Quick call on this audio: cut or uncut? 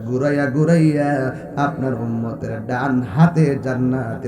uncut